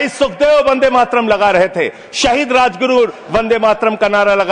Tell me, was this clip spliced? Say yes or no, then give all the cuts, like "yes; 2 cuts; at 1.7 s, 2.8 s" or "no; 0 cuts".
no; 0 cuts